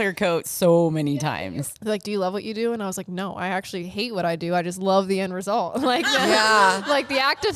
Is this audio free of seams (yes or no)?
no